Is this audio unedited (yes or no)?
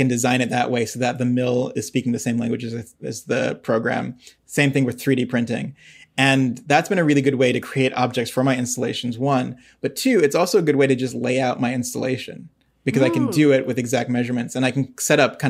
yes